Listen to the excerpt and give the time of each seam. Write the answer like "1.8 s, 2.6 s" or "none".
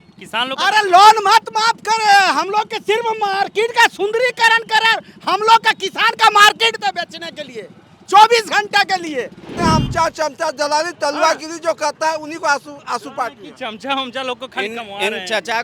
9.5 s